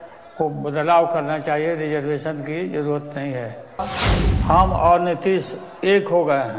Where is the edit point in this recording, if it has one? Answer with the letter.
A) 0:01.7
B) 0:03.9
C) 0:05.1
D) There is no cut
B